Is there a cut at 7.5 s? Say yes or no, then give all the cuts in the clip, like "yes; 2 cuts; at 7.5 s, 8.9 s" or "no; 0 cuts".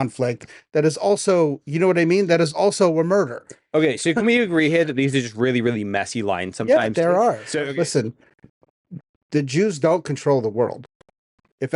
yes; 1 cut; at 7.5 s